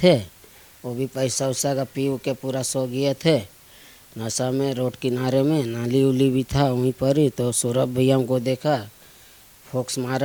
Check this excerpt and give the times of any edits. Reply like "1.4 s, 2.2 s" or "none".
none

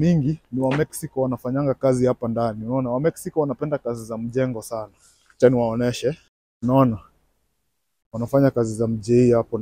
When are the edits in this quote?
none

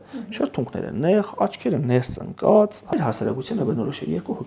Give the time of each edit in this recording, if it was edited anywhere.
2.8 s

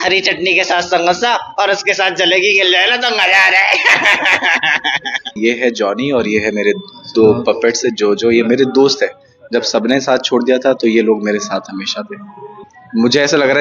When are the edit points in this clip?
5.4 s, 12.6 s

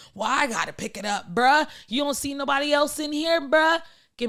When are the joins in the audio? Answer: none

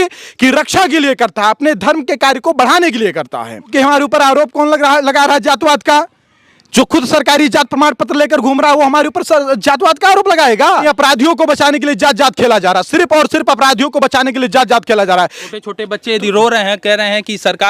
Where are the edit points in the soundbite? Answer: 3.7 s, 10.8 s, 15.4 s

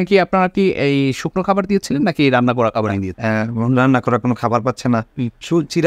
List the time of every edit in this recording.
3.1 s

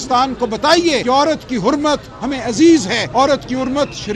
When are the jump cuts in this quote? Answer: 1.0 s, 3.0 s

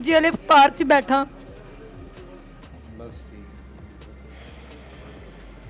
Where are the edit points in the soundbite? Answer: none

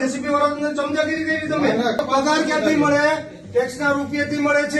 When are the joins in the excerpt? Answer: 2.0 s

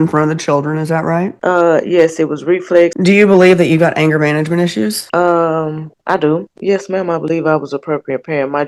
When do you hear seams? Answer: 1.3 s, 2.9 s, 5.0 s, 6.5 s

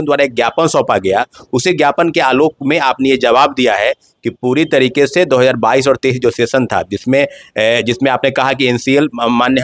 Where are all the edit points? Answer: none

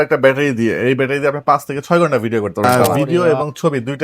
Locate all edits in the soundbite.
2.9 s

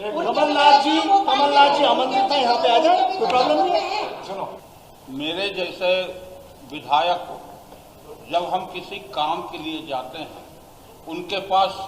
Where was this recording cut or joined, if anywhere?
4.6 s

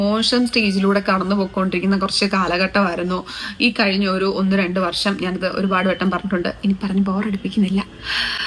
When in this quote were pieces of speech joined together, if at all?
none

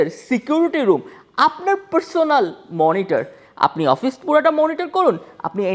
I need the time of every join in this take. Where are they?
none

